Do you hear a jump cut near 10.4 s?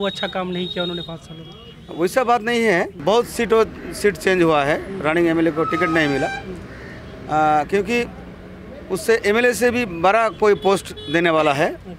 no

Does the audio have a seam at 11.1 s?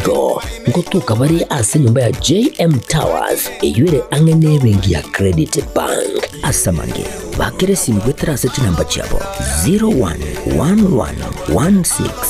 no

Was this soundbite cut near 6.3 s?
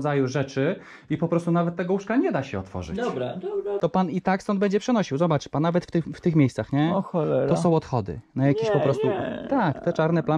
no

